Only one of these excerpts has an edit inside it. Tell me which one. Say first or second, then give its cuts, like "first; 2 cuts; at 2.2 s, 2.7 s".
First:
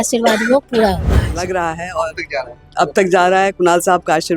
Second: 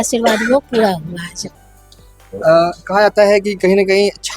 first; 1 cut; at 1.2 s